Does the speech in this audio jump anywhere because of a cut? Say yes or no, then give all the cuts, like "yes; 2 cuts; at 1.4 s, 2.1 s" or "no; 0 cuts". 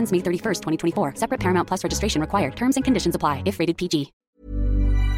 yes; 1 cut; at 4.2 s